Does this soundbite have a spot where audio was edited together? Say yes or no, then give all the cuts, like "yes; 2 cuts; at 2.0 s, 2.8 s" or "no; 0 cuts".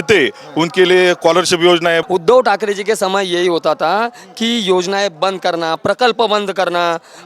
yes; 1 cut; at 2.0 s